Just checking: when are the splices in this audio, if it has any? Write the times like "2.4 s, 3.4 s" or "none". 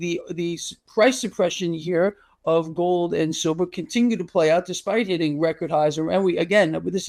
none